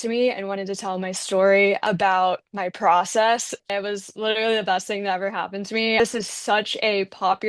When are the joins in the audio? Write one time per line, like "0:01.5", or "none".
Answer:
0:01.9
0:03.6
0:06.0